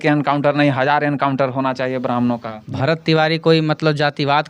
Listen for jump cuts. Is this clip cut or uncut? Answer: cut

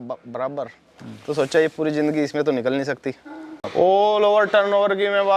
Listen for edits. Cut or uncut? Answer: cut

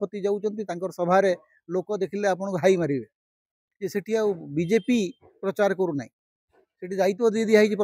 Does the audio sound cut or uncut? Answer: cut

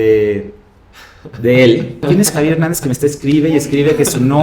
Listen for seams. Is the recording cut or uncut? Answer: cut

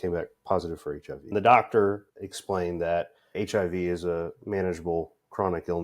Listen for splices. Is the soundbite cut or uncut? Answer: cut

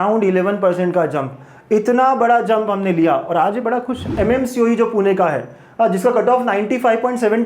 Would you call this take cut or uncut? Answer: cut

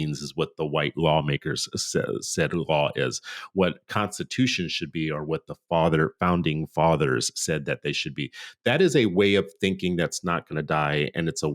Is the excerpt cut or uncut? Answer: uncut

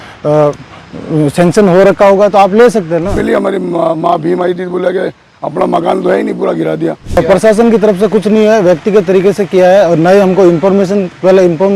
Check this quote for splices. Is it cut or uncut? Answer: cut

